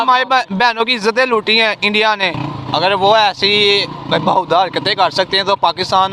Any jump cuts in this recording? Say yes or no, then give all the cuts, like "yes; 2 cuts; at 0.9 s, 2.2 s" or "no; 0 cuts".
yes; 1 cut; at 2.4 s